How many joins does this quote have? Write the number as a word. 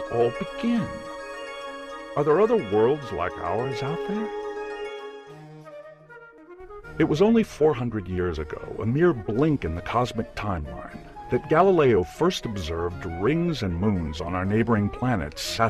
zero